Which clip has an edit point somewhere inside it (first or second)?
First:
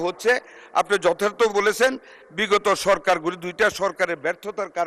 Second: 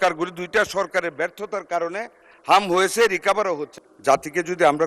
second